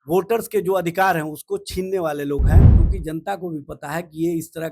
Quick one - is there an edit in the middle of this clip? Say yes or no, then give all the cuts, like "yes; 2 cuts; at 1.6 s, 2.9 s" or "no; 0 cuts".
yes; 1 cut; at 2.8 s